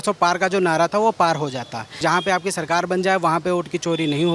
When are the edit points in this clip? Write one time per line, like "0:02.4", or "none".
0:01.9